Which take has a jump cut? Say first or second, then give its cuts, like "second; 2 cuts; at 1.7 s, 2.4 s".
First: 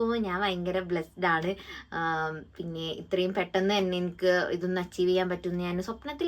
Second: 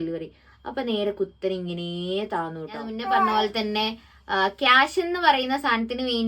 second; 1 cut; at 2.9 s